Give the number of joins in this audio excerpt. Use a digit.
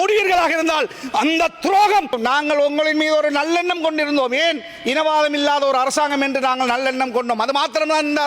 1